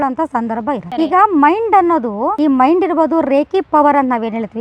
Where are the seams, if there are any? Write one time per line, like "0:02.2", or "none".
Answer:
0:00.9